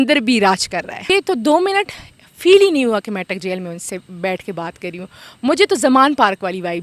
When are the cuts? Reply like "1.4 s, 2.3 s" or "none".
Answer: 1.1 s